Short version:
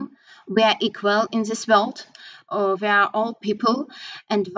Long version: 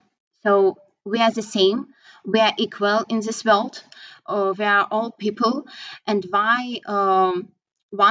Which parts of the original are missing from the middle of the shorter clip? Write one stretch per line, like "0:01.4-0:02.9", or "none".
none